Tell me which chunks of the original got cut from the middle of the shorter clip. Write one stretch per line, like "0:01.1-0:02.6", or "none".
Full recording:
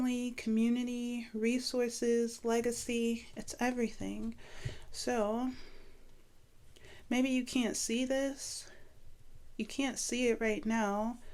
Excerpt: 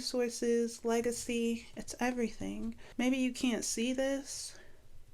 0:04.4-0:06.9